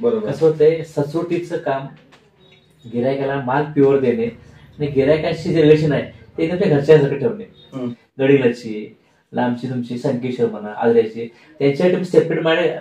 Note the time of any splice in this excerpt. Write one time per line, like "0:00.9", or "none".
0:07.8